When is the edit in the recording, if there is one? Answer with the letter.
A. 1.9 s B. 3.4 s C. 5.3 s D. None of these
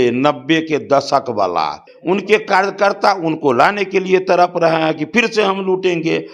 A